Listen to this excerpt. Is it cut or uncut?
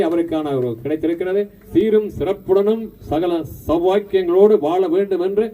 cut